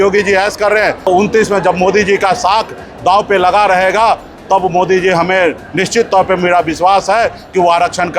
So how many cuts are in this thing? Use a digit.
1